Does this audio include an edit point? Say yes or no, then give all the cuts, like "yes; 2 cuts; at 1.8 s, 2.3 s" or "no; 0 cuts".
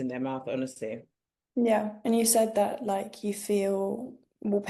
no; 0 cuts